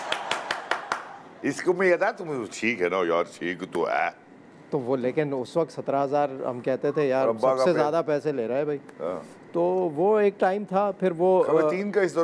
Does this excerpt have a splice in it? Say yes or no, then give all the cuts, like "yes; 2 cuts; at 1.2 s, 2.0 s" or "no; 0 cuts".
no; 0 cuts